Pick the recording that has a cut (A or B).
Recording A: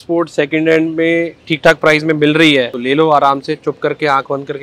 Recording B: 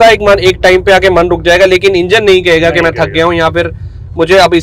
A